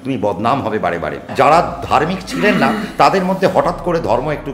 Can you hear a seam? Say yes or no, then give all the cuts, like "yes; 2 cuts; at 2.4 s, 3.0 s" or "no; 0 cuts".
yes; 1 cut; at 1.3 s